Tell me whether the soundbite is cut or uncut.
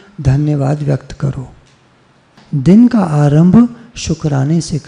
cut